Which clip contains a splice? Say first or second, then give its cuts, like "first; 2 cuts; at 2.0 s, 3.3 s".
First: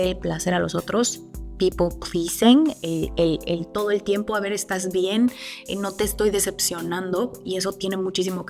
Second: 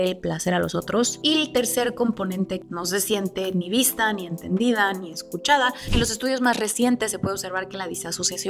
second; 3 cuts; at 1.2 s, 2.6 s, 5.8 s